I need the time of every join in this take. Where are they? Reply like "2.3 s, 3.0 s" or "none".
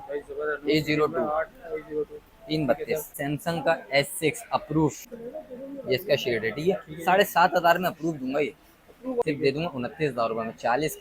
3.1 s, 5.1 s, 9.2 s